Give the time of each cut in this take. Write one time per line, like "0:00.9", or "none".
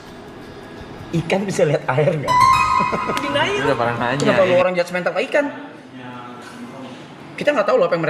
0:04.2